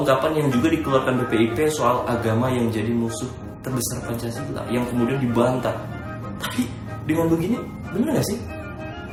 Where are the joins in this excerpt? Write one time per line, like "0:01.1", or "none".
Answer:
none